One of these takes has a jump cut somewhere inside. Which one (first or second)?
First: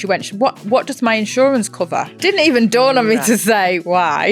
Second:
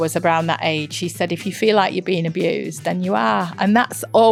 first